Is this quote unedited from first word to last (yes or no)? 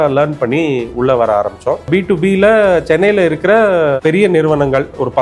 no